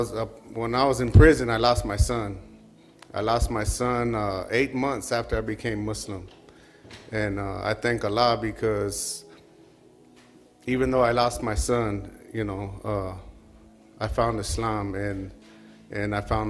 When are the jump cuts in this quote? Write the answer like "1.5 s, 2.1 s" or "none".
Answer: none